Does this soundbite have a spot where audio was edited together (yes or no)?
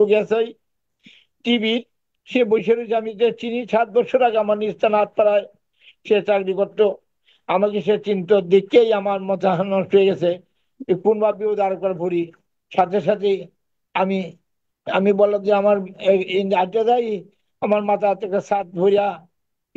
no